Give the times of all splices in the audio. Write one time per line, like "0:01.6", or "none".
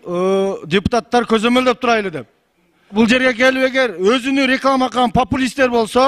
0:02.9